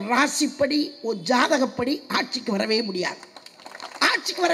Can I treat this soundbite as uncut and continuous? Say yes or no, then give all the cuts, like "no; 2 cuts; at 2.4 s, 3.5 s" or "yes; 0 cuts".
yes; 0 cuts